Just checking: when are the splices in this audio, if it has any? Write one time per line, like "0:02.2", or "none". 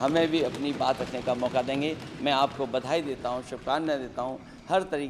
none